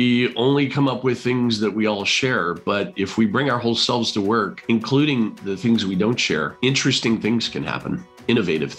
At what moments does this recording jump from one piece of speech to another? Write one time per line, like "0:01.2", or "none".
0:04.5
0:06.6